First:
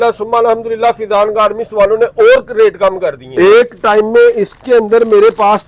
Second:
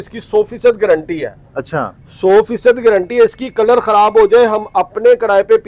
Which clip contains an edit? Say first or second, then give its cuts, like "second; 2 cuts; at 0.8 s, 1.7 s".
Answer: first; 1 cut; at 3.2 s